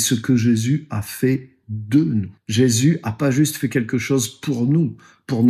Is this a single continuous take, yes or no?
no